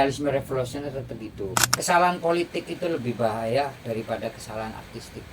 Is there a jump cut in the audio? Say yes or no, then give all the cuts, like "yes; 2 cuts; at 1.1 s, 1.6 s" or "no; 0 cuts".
yes; 1 cut; at 1.7 s